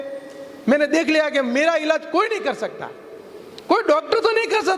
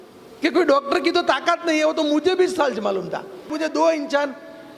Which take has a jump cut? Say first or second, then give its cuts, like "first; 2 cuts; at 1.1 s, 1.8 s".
second; 1 cut; at 3.5 s